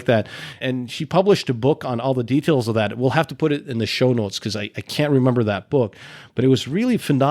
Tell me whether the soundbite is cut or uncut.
uncut